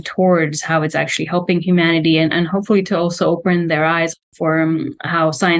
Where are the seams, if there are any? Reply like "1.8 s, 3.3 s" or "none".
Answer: 4.1 s